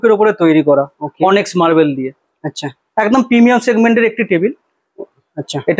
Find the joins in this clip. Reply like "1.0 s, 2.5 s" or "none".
none

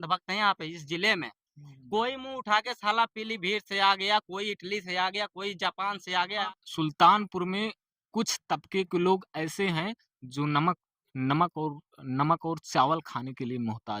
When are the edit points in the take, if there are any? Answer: 6.4 s

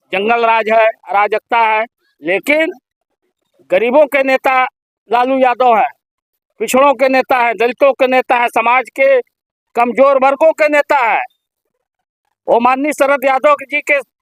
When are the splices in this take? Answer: none

